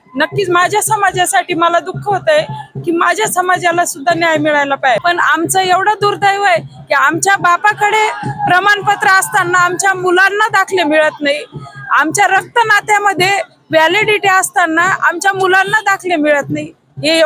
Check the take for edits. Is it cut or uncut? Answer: cut